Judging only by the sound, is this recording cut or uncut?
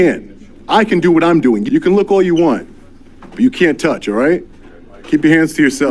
cut